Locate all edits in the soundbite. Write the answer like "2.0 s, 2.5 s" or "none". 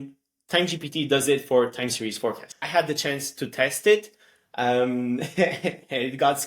2.6 s